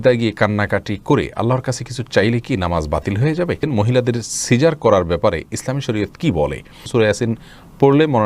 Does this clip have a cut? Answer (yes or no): yes